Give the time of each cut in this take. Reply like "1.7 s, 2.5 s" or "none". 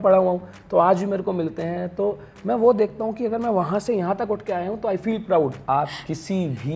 5.6 s